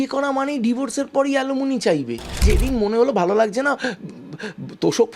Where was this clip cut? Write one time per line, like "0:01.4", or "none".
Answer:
0:02.4

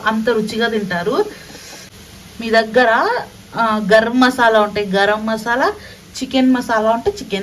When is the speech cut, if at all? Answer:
0:01.9

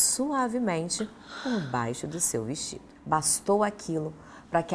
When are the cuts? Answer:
0:02.9

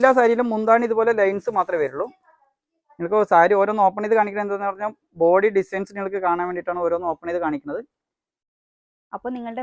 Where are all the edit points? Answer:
0:08.4

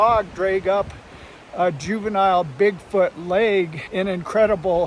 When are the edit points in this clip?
0:03.8

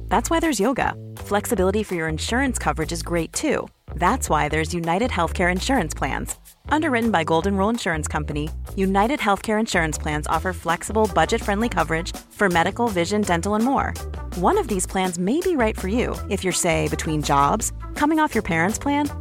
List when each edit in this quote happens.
none

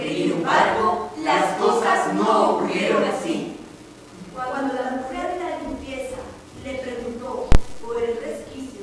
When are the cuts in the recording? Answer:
0:07.7

